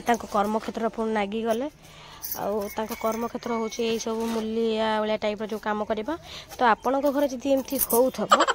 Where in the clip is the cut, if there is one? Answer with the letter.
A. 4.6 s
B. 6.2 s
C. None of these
C